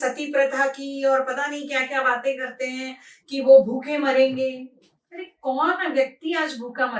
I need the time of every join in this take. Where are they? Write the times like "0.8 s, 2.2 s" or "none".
none